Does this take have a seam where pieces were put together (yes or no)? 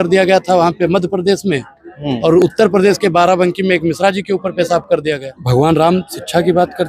yes